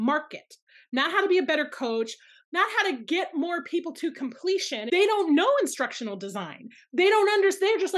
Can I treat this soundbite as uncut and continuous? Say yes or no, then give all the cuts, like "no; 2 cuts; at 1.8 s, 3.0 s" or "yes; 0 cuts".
no; 2 cuts; at 2.4 s, 4.7 s